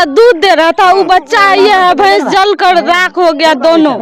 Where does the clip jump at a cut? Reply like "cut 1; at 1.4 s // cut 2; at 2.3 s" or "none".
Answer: none